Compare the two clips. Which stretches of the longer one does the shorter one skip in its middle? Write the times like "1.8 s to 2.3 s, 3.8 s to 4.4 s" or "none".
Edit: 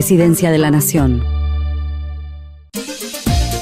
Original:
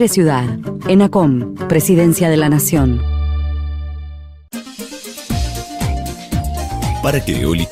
4.5 s to 4.7 s